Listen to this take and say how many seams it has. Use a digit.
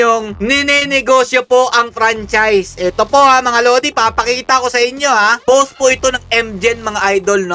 1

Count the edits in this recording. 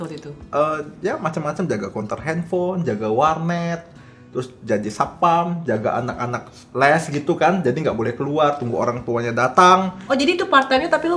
2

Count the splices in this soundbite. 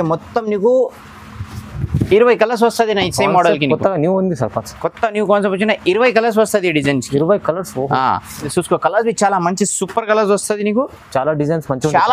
1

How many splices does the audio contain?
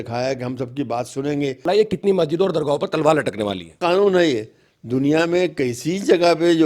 2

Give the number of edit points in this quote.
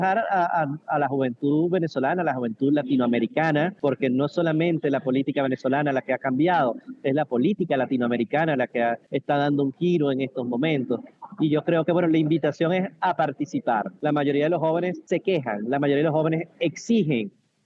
4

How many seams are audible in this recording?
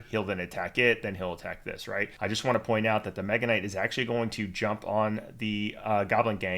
1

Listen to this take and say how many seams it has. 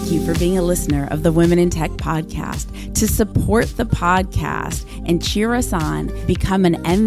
0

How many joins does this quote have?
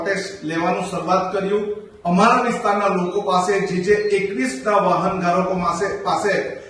1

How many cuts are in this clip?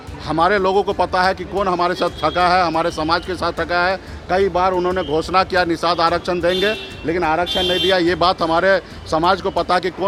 0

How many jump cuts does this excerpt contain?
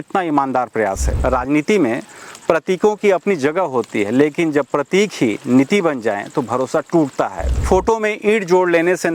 2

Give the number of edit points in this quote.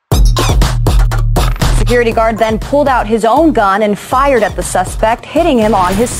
1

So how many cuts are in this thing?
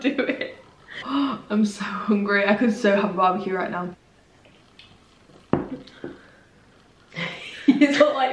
2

